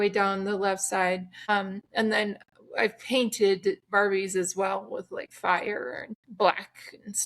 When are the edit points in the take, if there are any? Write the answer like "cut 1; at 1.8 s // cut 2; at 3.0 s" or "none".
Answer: cut 1; at 5.2 s // cut 2; at 6.2 s